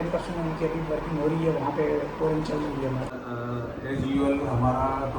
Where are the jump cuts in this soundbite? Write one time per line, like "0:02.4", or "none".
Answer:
0:03.1